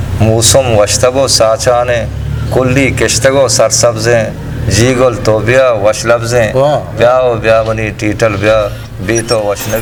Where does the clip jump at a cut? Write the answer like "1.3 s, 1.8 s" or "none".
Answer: none